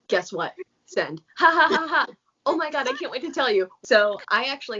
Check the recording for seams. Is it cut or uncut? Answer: cut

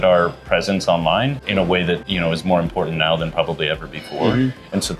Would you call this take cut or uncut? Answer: cut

